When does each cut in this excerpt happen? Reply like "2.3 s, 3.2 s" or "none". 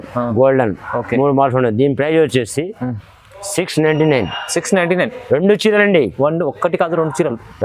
none